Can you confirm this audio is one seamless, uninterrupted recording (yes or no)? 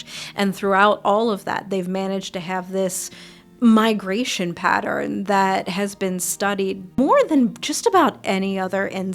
no